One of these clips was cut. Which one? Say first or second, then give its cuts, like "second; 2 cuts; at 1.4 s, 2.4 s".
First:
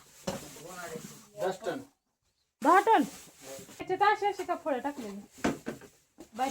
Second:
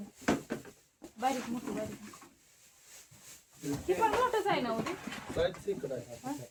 first; 1 cut; at 3.8 s